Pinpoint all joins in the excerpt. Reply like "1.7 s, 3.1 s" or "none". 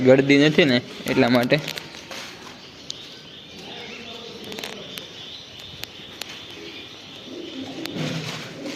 none